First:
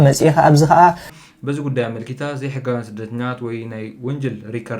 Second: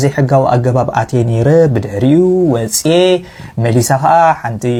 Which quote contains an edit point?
first; 1 cut; at 1.1 s

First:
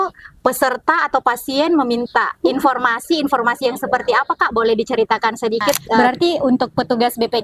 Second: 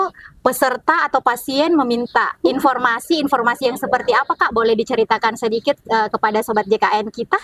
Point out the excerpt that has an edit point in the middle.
first; 1 cut; at 6.0 s

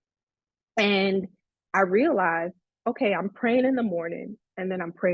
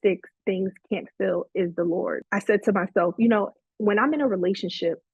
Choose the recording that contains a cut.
second; 1 cut; at 2.2 s

